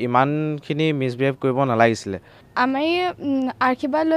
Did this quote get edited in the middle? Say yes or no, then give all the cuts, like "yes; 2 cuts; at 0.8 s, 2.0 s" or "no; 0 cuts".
yes; 1 cut; at 2.4 s